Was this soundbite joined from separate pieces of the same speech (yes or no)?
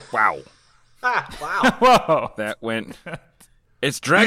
no